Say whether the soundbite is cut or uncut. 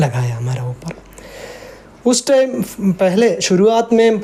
uncut